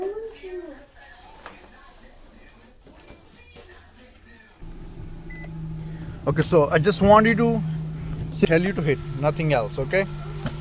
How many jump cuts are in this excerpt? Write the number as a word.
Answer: two